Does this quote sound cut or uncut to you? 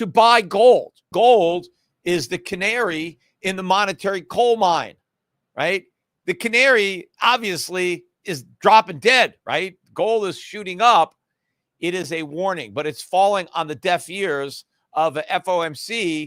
cut